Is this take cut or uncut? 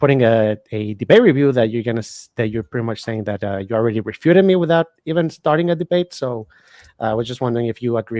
uncut